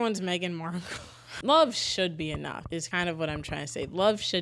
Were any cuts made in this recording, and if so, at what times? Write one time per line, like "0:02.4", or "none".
0:01.3
0:02.8